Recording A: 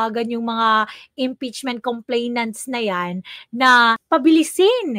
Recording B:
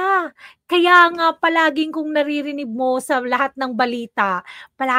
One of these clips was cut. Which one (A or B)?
A